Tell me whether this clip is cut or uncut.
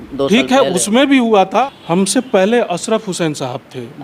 cut